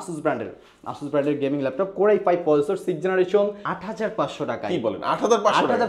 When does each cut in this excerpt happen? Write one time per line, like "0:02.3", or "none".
0:03.7